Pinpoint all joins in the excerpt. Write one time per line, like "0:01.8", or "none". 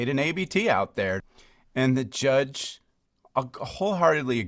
0:01.3